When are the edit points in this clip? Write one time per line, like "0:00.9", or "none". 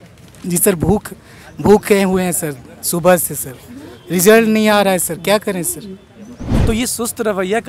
0:06.5